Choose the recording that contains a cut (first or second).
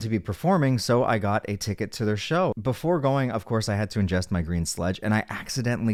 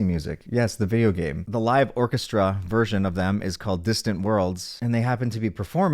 second